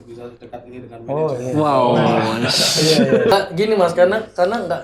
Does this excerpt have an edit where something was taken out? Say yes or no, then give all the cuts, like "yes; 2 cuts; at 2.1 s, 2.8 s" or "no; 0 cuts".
yes; 1 cut; at 3.3 s